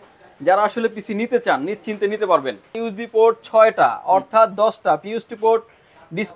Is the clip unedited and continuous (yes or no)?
no